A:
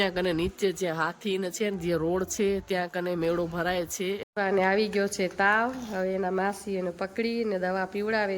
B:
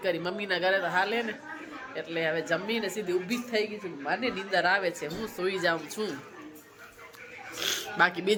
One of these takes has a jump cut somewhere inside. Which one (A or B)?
A